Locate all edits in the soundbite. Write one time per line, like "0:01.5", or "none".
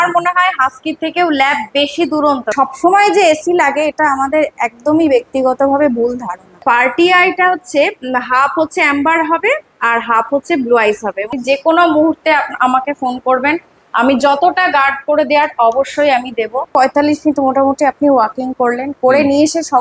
0:02.5
0:06.6
0:11.3
0:16.7